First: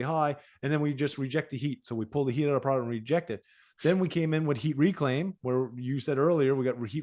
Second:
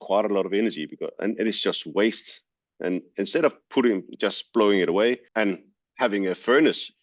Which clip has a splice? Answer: second; 1 cut; at 5.2 s

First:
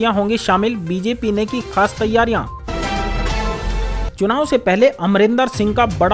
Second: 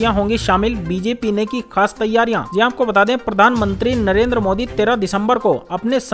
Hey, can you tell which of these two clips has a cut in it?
first; 2 cuts; at 2.5 s, 4.1 s

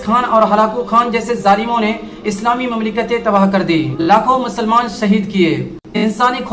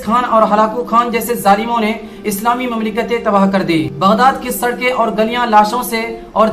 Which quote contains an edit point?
second; 1 cut; at 3.9 s

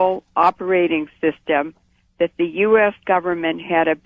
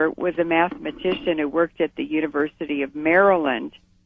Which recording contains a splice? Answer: second; 1 cut; at 2.6 s

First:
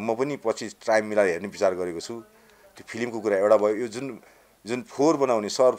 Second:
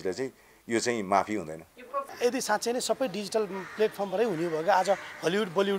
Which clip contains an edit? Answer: second; 1 cut; at 2.1 s

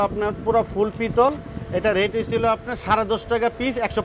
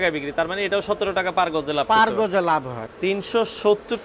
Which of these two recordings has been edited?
second; 1 cut; at 2.8 s

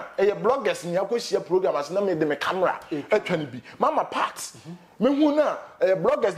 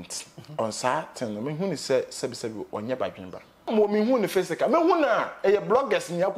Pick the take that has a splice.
second; 1 cut; at 3.7 s

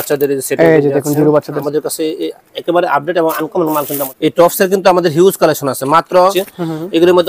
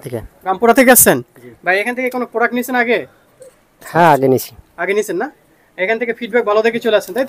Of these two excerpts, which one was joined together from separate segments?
first; 3 cuts; at 1.6 s, 4.1 s, 6.3 s

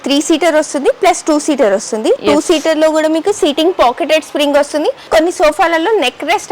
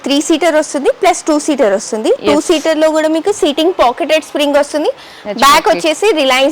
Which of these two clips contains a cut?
first; 1 cut; at 5.1 s

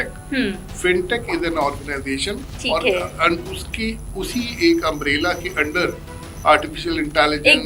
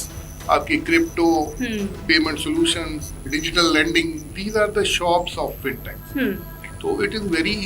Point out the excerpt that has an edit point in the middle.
second; 2 cuts; at 3.3 s, 6.7 s

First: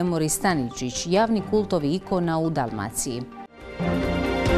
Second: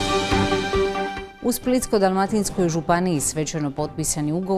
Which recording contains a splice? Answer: second; 1 cut; at 0.9 s

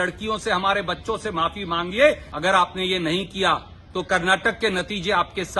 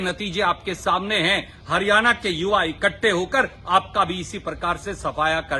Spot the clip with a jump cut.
first; 1 cut; at 2.3 s

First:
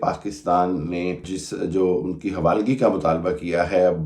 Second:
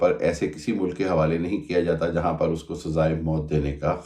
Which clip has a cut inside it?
first; 1 cut; at 1.4 s

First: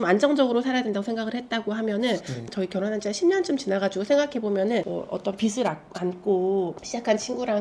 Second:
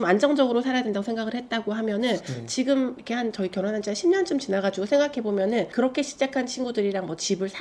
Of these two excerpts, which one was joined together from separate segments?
first; 2 cuts; at 2.5 s, 4.9 s

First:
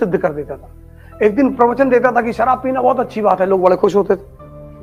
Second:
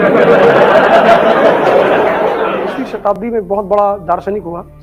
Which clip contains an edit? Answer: second; 1 cut; at 3.1 s

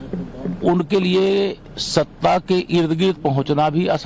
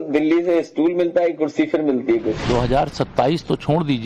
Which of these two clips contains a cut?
second; 1 cut; at 2.4 s

